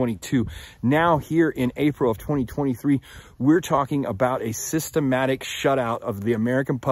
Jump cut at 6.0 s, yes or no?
yes